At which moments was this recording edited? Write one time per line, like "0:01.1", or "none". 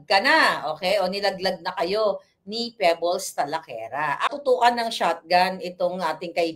0:04.3